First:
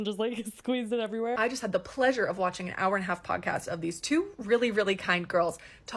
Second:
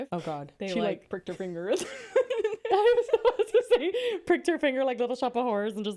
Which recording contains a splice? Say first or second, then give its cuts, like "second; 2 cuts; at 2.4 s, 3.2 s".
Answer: first; 1 cut; at 1.4 s